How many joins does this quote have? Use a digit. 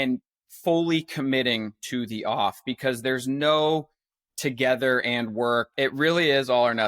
1